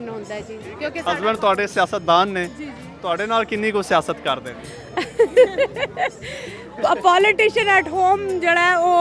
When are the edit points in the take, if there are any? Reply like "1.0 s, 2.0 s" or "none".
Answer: 1.0 s